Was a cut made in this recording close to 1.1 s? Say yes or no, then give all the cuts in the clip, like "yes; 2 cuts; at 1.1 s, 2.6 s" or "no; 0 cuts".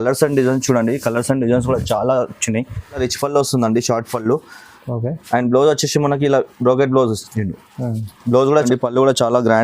no; 2 cuts; at 3.0 s, 8.6 s